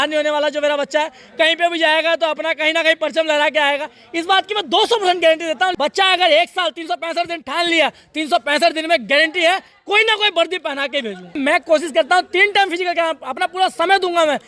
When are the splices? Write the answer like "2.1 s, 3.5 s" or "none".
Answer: 5.7 s, 11.4 s